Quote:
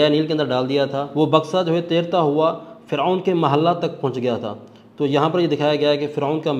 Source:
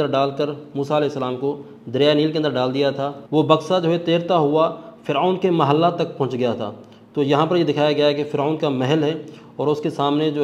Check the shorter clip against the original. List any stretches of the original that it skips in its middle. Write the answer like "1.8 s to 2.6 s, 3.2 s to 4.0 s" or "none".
3.1 s to 3.2 s